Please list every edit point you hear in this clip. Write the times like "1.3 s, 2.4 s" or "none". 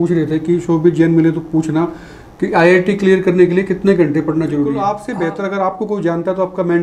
4.9 s